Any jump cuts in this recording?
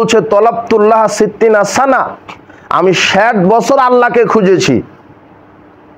no; 0 cuts

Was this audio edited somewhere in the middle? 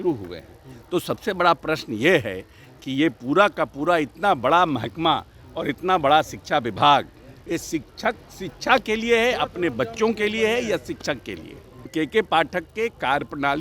yes; 1 cut; at 11.9 s

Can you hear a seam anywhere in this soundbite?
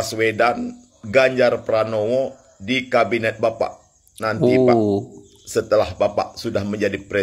no; 0 cuts

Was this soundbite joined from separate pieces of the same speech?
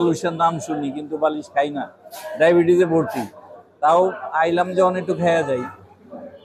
no; 0 cuts

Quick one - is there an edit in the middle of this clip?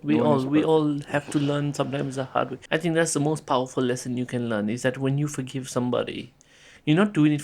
yes; 1 cut; at 2.6 s

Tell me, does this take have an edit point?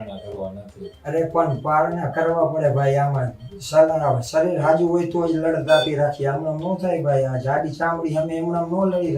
no; 0 cuts

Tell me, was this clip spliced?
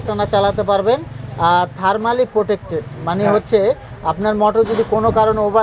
no; 0 cuts

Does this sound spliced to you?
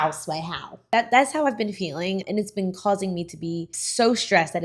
yes; 2 cuts; at 0.8 s, 2.2 s

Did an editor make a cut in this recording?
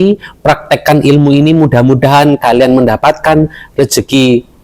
no; 0 cuts

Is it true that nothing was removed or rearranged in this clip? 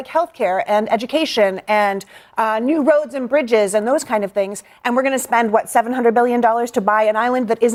yes; 0 cuts

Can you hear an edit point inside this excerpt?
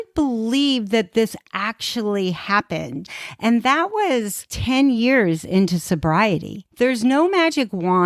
yes; 3 cuts; at 3.1 s, 4.5 s, 6.6 s

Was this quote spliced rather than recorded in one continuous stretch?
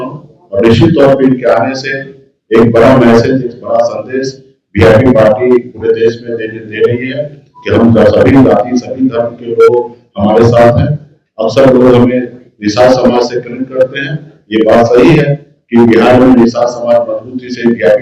no; 0 cuts

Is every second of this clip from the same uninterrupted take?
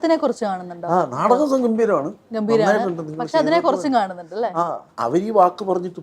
no; 1 cut; at 4.9 s

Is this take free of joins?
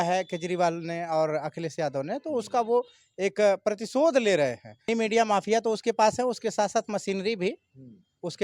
no; 1 cut; at 4.9 s

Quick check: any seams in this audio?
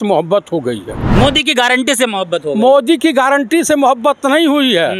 yes; 1 cut; at 0.9 s

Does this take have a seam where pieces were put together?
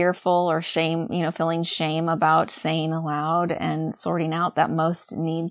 no; 0 cuts

